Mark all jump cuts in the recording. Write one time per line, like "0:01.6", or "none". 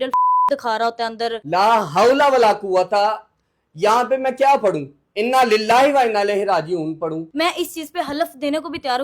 0:01.4
0:07.2